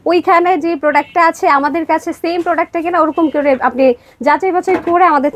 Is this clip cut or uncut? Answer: uncut